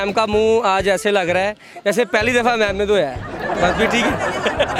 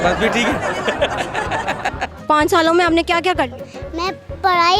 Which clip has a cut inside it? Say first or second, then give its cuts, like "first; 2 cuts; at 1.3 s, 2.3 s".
second; 1 cut; at 2.2 s